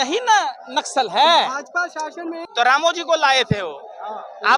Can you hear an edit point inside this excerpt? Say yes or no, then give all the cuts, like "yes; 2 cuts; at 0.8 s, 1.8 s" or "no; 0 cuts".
yes; 1 cut; at 2.4 s